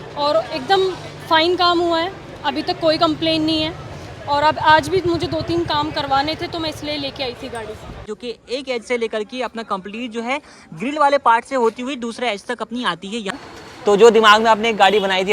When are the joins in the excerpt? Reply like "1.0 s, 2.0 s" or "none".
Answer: 8.1 s, 13.4 s